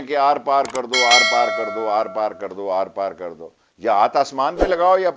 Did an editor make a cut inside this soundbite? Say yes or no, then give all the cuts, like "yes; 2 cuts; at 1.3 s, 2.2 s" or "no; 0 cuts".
no; 0 cuts